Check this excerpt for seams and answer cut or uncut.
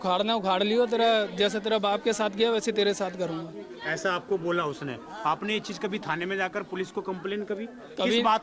uncut